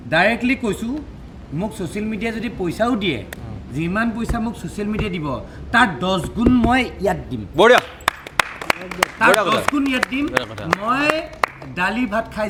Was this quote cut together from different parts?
no; 0 cuts

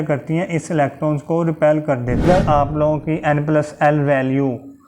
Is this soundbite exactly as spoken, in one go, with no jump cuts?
no; 1 cut; at 2.2 s

